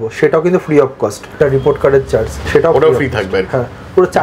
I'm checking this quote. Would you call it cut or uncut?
cut